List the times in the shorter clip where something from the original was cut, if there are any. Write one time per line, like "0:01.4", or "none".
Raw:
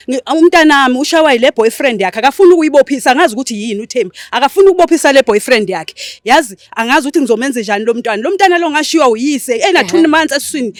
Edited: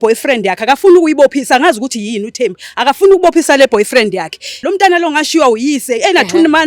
0:04.6